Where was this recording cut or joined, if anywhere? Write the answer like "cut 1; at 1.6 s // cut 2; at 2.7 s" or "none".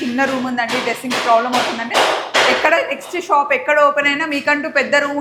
none